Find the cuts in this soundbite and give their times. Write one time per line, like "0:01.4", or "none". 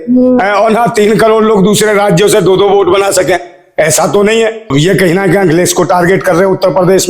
0:04.7

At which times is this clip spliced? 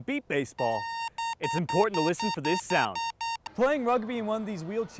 0:03.4

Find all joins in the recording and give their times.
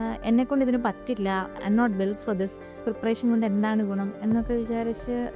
0:01.5
0:02.8

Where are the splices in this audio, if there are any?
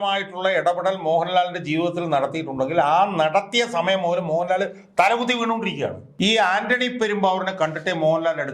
0:06.0

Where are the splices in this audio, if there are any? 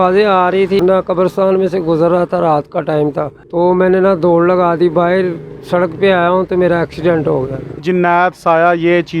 0:00.8
0:03.4
0:07.8

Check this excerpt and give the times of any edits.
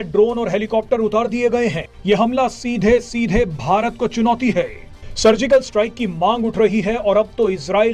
0:01.9

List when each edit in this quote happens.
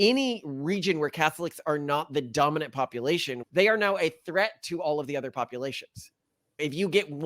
0:03.4

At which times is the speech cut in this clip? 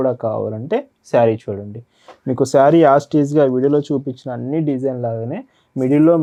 none

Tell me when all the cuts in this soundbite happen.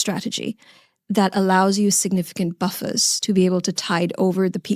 none

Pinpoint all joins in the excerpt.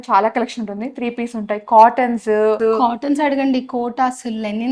0:02.6

